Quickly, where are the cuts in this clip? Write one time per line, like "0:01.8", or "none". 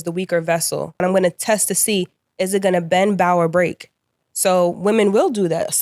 0:01.0